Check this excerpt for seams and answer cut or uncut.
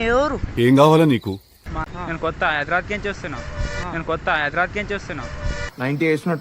cut